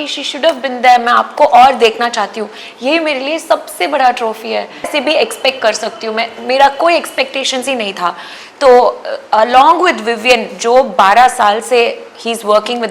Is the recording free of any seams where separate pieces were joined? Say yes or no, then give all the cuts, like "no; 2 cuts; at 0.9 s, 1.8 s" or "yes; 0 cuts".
no; 1 cut; at 4.9 s